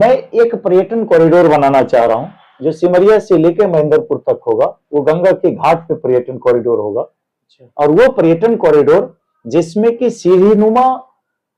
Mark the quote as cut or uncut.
uncut